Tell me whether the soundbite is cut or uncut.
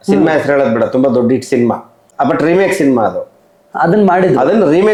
uncut